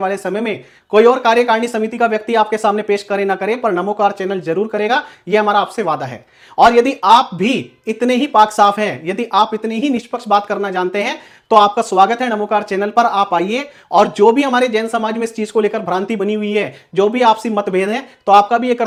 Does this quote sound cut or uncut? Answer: uncut